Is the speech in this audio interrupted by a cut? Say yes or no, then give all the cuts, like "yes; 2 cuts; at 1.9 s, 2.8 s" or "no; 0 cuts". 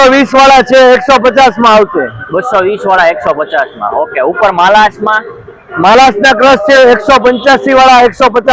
no; 0 cuts